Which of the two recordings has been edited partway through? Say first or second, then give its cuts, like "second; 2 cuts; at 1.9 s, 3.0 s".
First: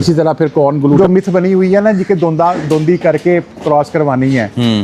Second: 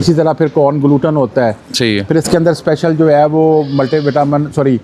first; 1 cut; at 1.0 s